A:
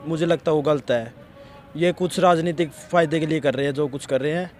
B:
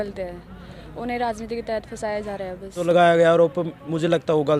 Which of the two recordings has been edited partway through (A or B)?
B